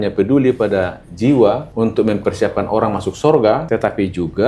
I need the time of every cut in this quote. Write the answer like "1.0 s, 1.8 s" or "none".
1.7 s, 3.6 s